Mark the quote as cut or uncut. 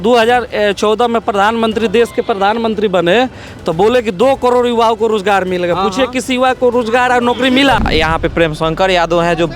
cut